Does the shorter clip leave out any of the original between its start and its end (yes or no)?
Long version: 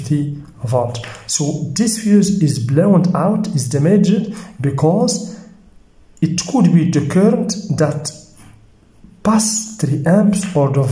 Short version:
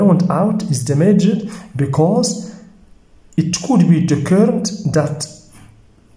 no